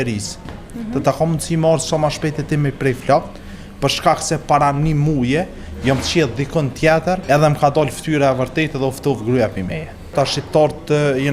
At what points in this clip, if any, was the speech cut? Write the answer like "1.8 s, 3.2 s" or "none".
7.2 s, 10.1 s